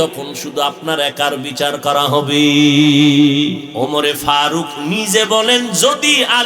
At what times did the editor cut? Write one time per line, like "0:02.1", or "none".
0:03.7